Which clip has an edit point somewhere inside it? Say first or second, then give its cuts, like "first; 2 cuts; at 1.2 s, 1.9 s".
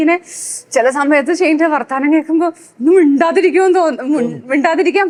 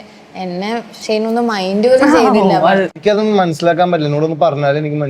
second; 1 cut; at 3.0 s